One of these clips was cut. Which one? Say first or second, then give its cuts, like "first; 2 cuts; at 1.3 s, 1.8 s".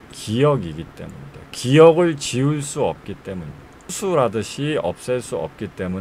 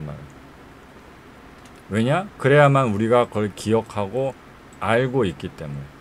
first; 1 cut; at 3.9 s